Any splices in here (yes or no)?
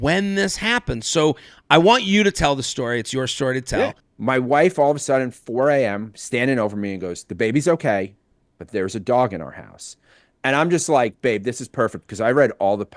yes